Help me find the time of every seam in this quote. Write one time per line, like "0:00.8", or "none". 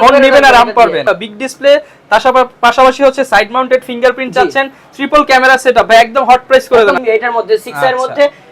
0:01.0
0:07.0